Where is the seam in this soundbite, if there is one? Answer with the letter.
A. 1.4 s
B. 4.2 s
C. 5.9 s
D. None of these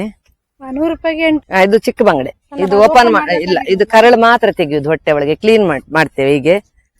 A